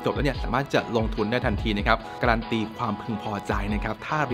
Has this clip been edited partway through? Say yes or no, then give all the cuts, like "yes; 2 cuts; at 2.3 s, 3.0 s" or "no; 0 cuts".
yes; 1 cut; at 2.1 s